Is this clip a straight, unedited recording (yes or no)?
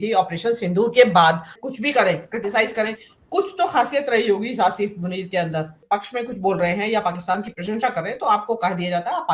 no